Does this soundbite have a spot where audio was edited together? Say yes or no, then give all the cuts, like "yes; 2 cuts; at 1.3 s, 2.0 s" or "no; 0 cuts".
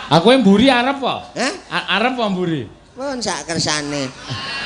no; 0 cuts